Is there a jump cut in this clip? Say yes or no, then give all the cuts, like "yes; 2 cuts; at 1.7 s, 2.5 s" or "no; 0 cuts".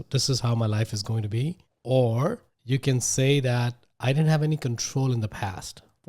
yes; 2 cuts; at 1.7 s, 2.5 s